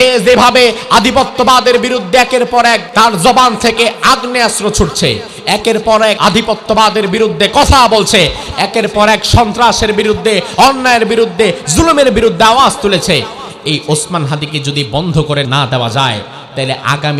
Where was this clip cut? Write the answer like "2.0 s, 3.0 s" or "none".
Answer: 2.9 s, 6.2 s, 15.5 s